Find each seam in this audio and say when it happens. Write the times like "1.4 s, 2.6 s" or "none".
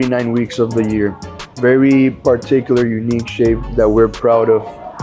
1.5 s, 3.6 s